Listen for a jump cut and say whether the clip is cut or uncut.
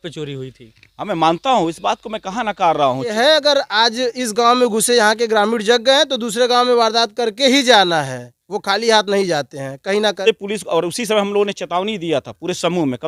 cut